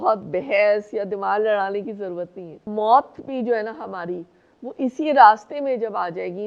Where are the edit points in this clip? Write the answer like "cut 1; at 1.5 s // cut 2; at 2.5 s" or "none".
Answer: cut 1; at 2.6 s